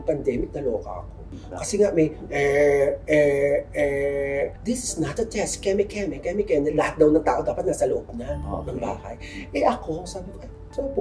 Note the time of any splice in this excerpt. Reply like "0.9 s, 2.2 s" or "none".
none